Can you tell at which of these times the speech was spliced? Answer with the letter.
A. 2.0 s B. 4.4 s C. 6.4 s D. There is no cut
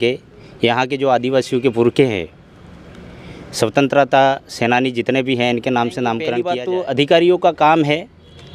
C